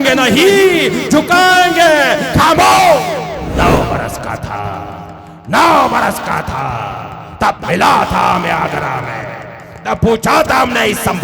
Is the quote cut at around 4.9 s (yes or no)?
no